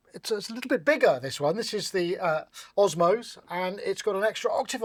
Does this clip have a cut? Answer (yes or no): no